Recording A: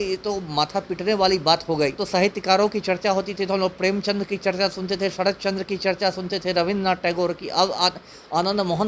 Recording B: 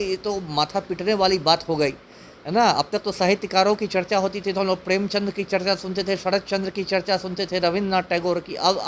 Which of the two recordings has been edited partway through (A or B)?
A